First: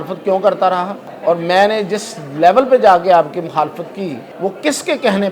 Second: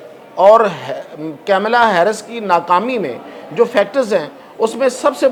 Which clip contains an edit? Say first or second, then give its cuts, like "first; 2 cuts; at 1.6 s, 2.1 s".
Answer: first; 2 cuts; at 1.0 s, 4.2 s